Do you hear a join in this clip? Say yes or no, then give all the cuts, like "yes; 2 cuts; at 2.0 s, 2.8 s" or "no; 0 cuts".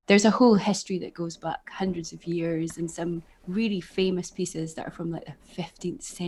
no; 0 cuts